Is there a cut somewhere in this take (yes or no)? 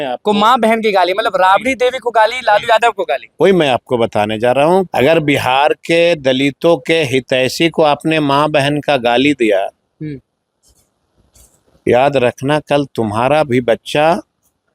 yes